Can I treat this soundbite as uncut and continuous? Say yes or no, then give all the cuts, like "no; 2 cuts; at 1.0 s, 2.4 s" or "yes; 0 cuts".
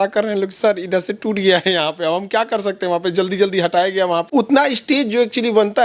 no; 1 cut; at 4.3 s